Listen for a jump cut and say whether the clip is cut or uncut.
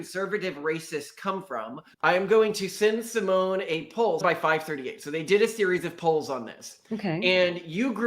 cut